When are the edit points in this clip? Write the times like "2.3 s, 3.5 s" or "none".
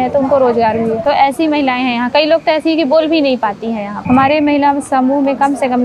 1.0 s, 3.9 s